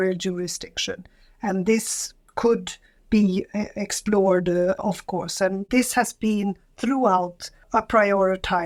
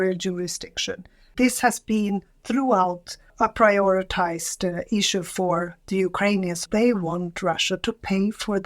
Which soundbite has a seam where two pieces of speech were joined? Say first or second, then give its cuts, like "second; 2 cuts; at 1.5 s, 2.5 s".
second; 2 cuts; at 1.3 s, 6.6 s